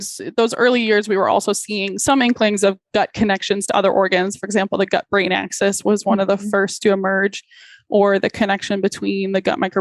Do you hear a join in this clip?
yes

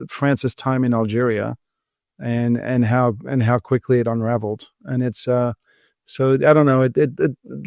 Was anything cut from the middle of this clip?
no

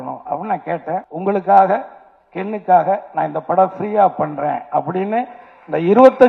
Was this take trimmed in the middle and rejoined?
yes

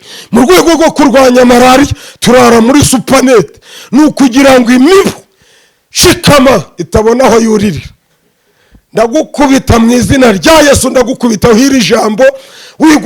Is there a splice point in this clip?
no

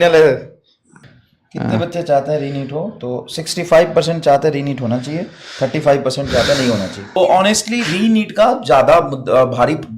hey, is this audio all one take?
no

